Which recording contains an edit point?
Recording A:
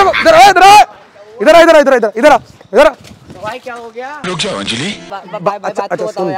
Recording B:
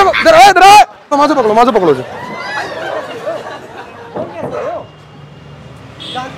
B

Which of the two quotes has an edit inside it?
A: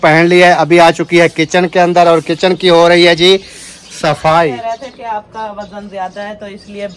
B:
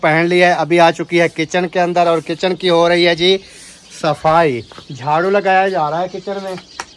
A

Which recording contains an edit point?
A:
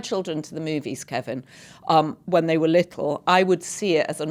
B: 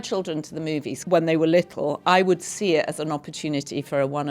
B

